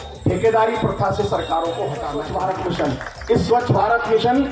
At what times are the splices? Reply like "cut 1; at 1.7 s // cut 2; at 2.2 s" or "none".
cut 1; at 2.1 s